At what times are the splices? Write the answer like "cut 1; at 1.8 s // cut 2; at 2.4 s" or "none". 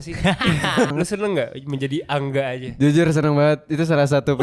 cut 1; at 0.9 s